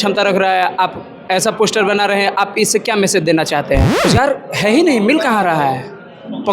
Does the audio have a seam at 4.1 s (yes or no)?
yes